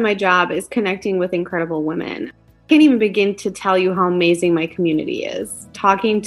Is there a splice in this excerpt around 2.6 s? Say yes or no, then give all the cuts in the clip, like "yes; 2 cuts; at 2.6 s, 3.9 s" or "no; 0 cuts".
yes; 1 cut; at 2.6 s